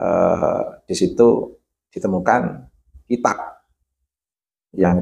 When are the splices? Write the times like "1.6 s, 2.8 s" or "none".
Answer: none